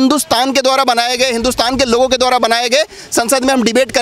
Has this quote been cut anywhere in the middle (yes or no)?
no